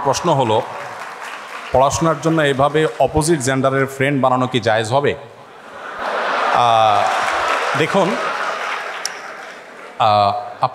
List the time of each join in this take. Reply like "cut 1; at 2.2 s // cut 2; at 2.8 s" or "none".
none